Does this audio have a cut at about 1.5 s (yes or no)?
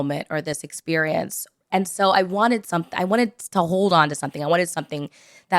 yes